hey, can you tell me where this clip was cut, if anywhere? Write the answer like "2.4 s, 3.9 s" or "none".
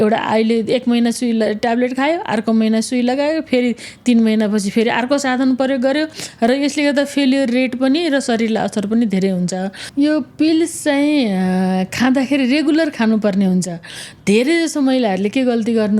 9.8 s